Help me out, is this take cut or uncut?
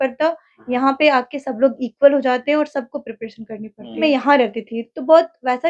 cut